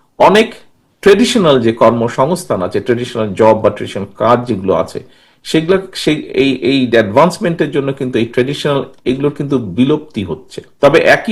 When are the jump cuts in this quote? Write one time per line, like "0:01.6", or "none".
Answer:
none